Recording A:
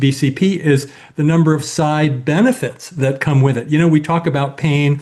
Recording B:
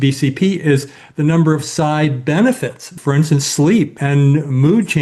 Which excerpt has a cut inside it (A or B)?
B